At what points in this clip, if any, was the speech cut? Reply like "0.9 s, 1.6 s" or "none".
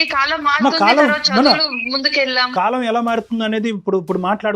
2.5 s